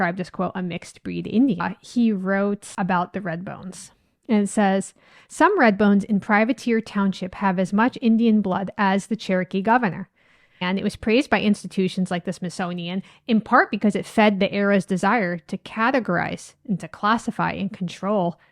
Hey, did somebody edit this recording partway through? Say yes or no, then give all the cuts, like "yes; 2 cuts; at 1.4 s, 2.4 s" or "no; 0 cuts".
yes; 3 cuts; at 1.7 s, 2.7 s, 10.6 s